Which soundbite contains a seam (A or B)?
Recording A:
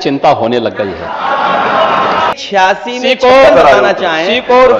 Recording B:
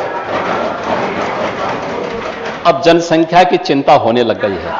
A